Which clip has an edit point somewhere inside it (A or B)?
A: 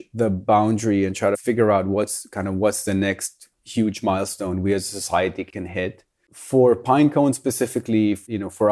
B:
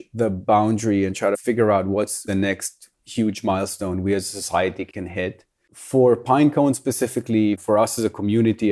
B